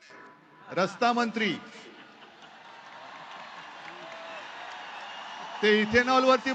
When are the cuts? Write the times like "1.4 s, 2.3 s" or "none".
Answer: none